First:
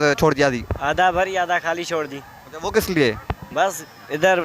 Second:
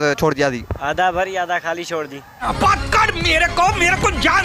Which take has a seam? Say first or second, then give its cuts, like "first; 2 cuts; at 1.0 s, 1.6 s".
first; 1 cut; at 2.3 s